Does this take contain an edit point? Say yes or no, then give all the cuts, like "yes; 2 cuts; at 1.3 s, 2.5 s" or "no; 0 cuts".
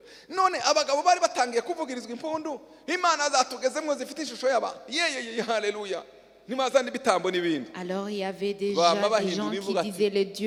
no; 0 cuts